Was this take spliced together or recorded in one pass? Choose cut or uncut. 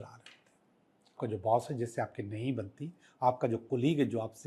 cut